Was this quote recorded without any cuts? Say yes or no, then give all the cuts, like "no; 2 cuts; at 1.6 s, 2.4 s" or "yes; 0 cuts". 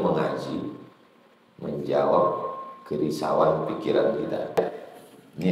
no; 1 cut; at 4.6 s